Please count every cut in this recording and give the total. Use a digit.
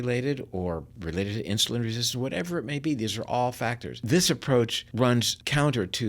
2